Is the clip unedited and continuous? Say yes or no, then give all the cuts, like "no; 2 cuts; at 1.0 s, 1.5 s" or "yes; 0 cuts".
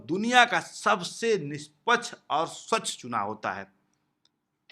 yes; 0 cuts